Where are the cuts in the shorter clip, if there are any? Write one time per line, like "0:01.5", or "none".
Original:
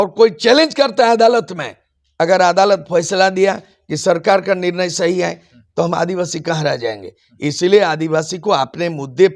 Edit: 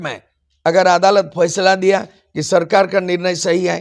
none